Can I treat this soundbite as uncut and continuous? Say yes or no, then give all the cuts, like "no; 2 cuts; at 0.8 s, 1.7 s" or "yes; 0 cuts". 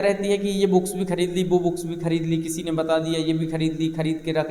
yes; 0 cuts